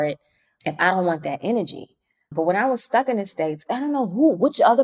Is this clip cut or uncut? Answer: cut